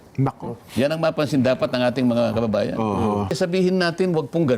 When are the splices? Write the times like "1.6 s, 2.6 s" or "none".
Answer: 3.4 s

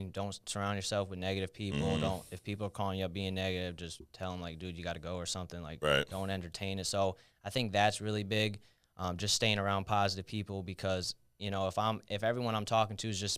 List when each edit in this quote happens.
none

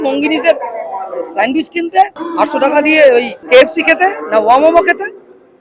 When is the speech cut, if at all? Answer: 2.3 s, 3.4 s

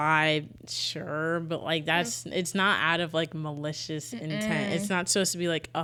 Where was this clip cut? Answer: none

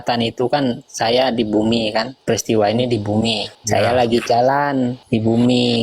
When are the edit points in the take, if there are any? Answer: 2.1 s, 3.5 s, 5.0 s

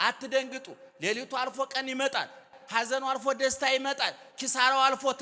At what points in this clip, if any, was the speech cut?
2.5 s

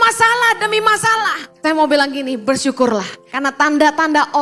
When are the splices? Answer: 1.4 s, 3.2 s

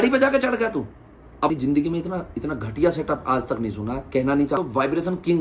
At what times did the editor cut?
1.5 s, 4.6 s

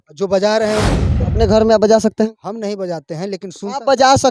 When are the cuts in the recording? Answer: 1.2 s

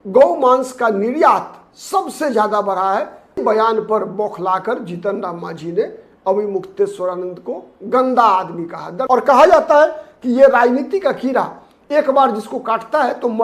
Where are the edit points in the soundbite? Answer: 3.4 s, 9.0 s

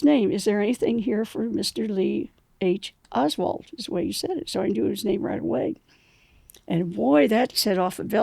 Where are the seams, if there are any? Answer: none

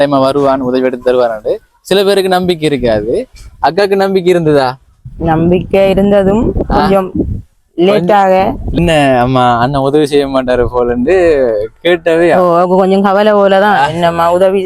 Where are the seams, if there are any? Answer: 8.8 s

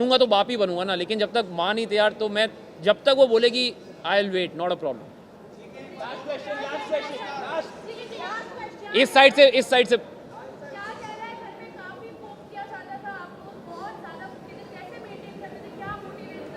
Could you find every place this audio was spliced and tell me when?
none

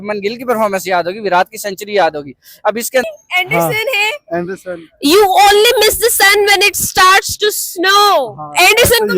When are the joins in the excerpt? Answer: 3.0 s

